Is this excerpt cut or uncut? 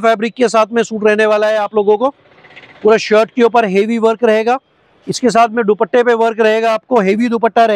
uncut